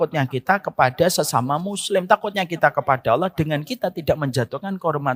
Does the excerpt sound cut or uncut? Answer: uncut